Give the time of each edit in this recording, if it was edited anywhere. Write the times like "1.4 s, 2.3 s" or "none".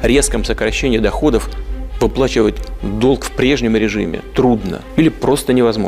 4.8 s